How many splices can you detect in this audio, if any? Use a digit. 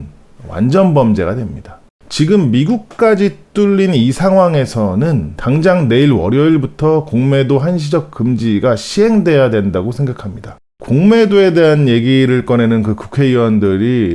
2